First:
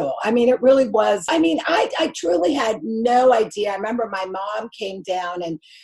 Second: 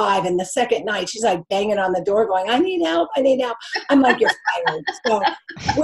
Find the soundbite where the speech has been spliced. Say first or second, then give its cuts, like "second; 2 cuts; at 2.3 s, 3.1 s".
first; 1 cut; at 1.3 s